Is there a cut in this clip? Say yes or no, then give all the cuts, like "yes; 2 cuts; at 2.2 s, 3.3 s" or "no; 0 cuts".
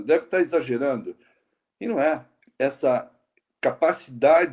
yes; 1 cut; at 2.4 s